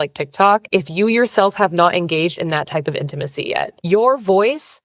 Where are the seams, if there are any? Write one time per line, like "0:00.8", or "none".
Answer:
none